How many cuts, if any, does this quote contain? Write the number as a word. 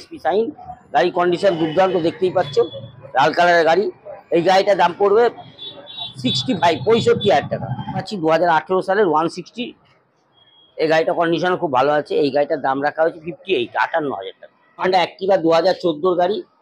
two